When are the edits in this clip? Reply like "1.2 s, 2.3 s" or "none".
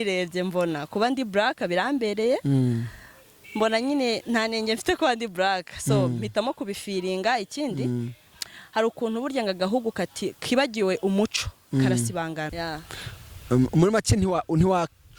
12.5 s